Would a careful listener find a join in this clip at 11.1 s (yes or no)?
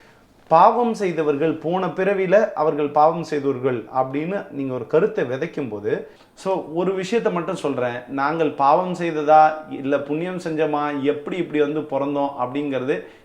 no